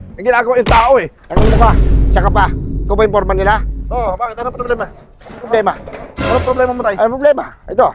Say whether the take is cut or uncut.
uncut